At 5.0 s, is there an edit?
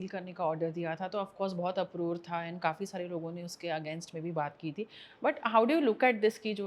no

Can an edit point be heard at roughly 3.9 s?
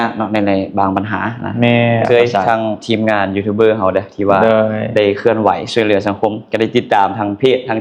no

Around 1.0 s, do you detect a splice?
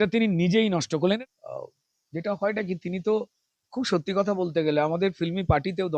yes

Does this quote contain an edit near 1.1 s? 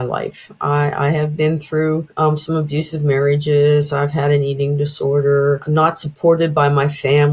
no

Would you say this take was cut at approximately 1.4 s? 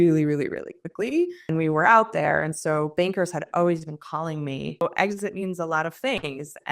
yes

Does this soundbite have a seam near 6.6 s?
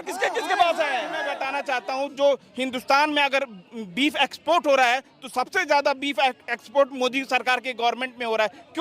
no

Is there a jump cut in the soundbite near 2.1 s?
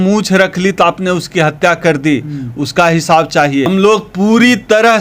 no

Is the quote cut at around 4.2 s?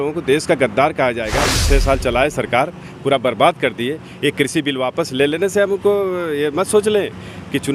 no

